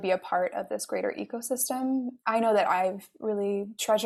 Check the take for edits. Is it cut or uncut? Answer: uncut